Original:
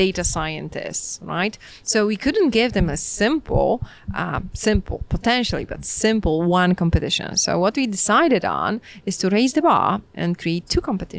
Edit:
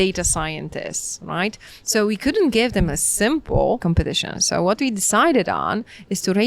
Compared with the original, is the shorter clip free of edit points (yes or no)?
no